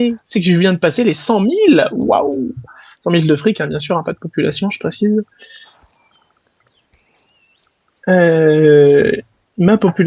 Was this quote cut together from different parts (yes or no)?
no